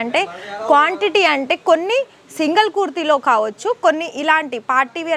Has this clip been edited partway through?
no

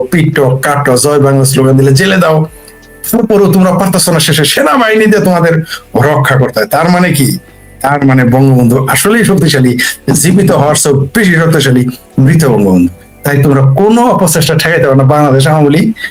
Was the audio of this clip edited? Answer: no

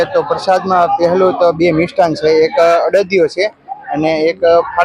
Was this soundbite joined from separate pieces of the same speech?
no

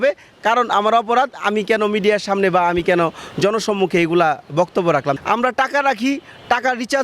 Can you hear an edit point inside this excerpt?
yes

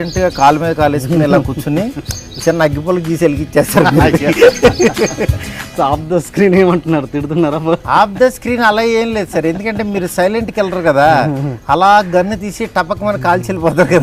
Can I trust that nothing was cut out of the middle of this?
no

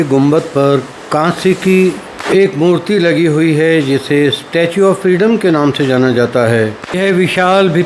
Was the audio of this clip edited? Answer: yes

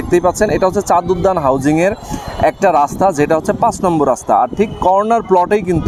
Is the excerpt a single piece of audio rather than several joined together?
yes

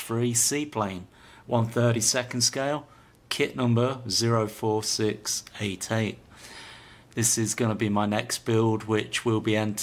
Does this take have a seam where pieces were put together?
yes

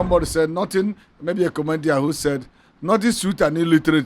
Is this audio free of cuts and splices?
yes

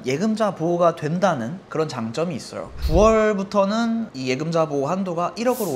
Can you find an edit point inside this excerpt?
yes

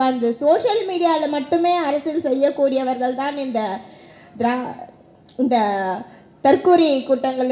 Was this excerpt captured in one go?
yes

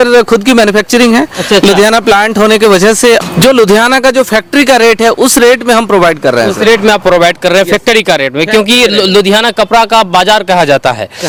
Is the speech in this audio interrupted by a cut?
no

